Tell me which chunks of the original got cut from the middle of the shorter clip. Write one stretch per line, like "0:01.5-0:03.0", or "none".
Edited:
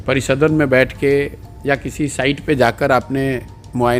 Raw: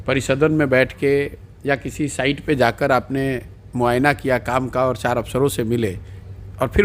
none